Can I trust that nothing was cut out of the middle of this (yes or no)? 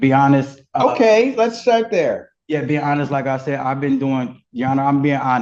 yes